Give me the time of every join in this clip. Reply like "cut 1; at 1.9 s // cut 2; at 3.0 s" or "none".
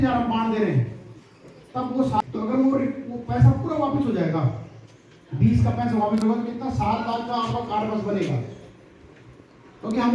cut 1; at 2.1 s